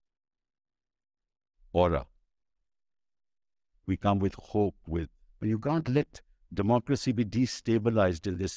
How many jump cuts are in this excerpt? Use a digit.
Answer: 1